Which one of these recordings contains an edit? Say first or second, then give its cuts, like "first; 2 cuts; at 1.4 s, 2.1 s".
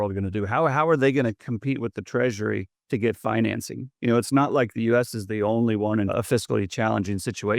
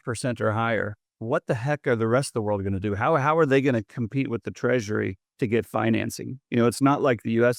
first; 1 cut; at 6.1 s